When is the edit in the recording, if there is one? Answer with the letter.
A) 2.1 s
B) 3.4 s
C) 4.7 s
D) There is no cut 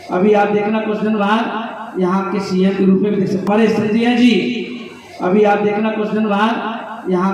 B